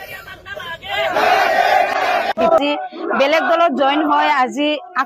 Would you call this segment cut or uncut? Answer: cut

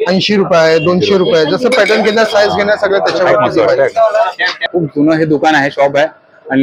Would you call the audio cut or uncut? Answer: cut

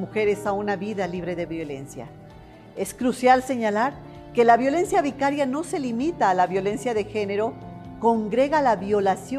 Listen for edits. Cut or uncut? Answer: uncut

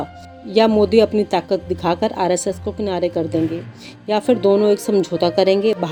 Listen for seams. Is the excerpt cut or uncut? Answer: uncut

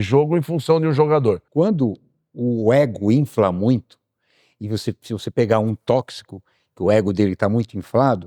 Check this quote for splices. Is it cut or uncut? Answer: cut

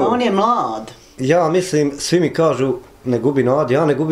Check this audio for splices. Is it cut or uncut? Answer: cut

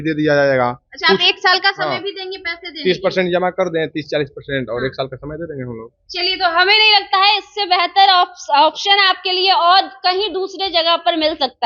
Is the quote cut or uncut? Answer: uncut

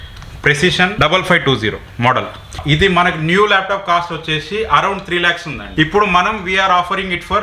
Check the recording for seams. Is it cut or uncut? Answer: cut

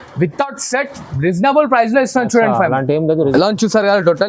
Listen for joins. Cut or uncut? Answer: cut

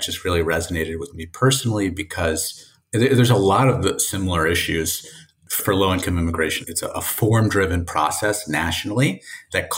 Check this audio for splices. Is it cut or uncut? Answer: cut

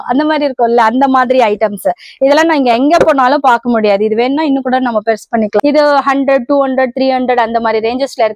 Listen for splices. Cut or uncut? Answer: cut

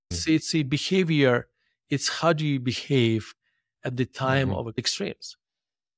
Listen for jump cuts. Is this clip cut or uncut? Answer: cut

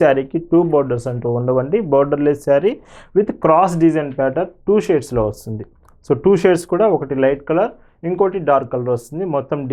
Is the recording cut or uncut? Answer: uncut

